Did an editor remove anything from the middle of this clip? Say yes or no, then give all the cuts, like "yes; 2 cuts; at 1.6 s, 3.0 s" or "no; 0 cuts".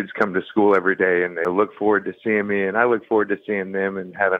yes; 1 cut; at 1.4 s